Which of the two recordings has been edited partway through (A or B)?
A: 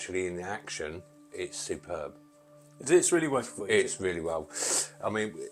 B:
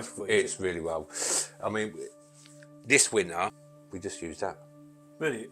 B